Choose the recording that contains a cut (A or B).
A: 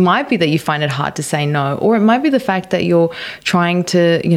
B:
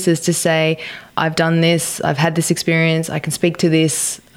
B